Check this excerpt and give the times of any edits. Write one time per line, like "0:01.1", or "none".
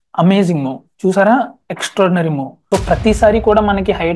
0:02.6